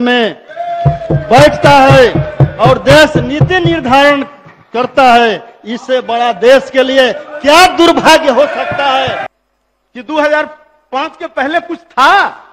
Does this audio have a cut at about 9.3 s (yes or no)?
yes